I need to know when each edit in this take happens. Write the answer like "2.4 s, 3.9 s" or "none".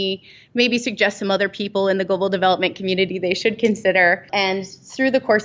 4.2 s